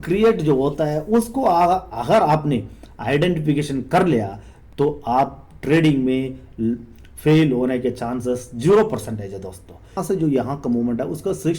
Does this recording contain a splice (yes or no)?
yes